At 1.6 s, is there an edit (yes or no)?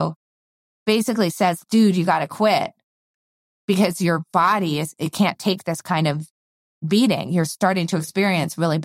yes